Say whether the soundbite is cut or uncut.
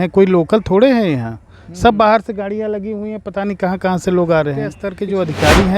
cut